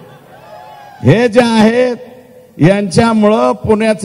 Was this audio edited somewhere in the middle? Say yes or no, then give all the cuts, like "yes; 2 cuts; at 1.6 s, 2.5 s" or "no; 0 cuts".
no; 0 cuts